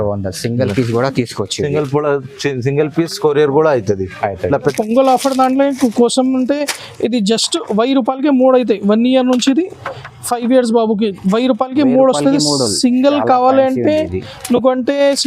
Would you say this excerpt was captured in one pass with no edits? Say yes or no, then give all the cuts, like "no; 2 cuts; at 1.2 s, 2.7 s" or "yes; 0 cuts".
no; 1 cut; at 4.7 s